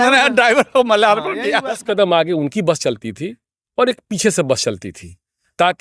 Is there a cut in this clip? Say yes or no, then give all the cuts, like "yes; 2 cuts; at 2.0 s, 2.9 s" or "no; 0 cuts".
yes; 1 cut; at 1.8 s